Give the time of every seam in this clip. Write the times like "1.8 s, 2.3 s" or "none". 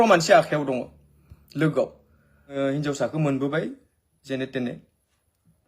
2.5 s